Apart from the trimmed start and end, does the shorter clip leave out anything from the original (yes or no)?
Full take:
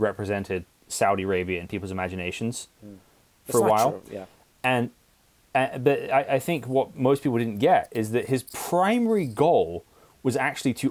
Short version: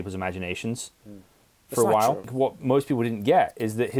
yes